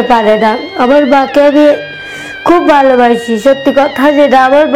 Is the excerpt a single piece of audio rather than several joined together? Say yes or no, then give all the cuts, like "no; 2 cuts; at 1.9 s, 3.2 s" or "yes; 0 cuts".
yes; 0 cuts